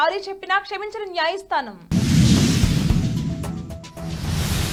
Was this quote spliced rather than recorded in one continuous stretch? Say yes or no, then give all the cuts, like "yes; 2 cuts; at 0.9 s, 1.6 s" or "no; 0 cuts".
no; 0 cuts